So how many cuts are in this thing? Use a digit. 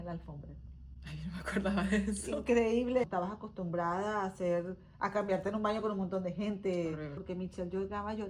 2